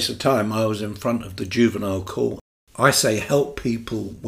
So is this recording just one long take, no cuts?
no; 1 cut; at 2.5 s

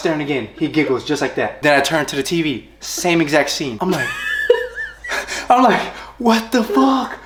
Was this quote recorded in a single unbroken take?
yes; 0 cuts

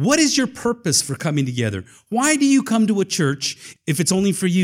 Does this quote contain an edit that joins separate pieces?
yes; 1 cut; at 3.6 s

